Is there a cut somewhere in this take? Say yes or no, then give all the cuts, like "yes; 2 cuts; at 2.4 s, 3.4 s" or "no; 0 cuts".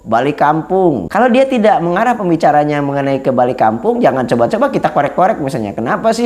yes; 1 cut; at 1.1 s